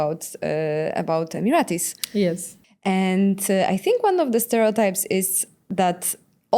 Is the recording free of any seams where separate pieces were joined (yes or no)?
no